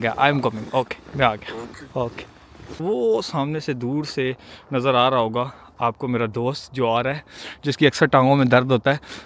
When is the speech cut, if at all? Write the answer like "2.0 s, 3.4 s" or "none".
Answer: 2.8 s